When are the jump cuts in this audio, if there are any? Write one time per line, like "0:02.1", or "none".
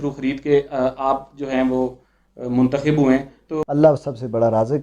0:03.3